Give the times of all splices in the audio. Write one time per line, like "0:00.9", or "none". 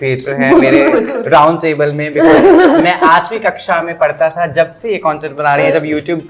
none